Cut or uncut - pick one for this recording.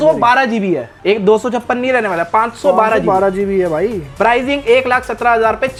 uncut